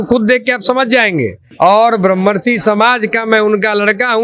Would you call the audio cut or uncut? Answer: cut